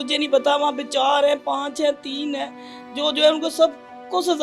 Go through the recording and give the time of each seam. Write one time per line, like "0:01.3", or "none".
none